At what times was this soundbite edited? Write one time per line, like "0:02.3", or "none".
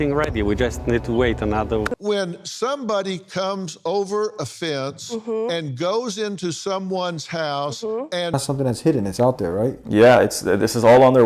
0:01.9
0:08.3